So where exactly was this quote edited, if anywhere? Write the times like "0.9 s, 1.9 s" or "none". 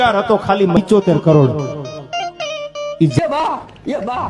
none